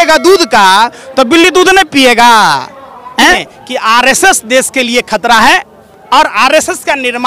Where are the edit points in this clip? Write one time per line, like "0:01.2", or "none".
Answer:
0:03.5